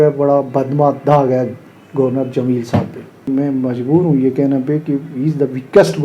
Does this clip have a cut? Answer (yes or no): yes